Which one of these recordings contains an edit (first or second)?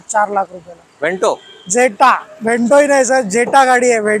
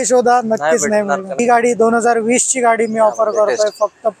second